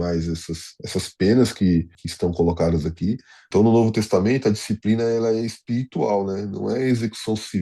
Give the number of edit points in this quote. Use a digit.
2